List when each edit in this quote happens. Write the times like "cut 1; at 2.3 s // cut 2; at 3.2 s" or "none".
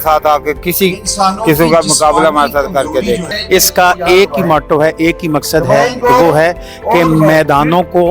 cut 1; at 3.3 s